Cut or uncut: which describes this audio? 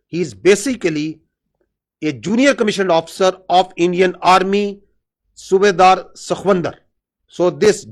uncut